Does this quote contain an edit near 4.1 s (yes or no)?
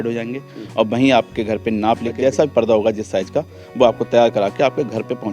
no